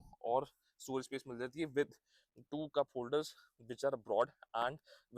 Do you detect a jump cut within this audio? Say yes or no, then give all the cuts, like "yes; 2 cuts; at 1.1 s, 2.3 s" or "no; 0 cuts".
no; 0 cuts